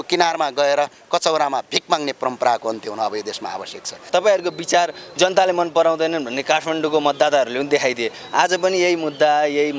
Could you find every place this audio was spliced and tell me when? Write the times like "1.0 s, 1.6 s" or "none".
4.0 s